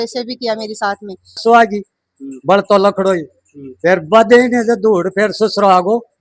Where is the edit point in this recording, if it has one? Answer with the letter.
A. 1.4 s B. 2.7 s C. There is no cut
A